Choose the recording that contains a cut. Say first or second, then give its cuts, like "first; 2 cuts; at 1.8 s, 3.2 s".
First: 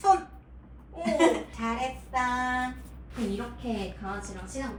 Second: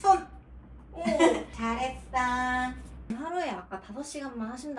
second; 1 cut; at 3.1 s